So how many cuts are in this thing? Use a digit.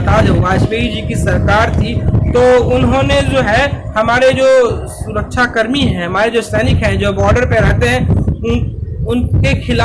0